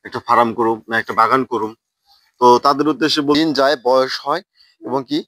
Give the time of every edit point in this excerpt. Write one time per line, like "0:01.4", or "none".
0:03.3